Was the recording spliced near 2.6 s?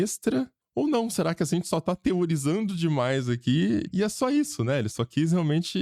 no; 1 cut; at 3.9 s

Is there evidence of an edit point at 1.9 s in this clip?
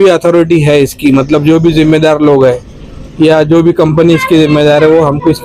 no; 0 cuts

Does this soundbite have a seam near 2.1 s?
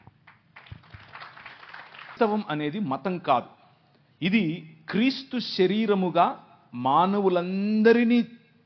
yes; 1 cut; at 2.1 s

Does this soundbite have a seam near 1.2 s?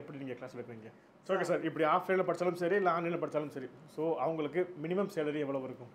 yes; 1 cut; at 1.2 s

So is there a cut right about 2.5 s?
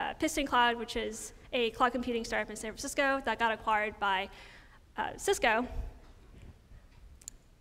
yes; 1 cut; at 2.5 s

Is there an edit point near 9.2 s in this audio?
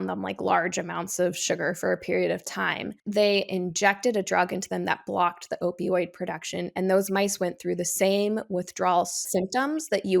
yes; 1 cut; at 9.2 s

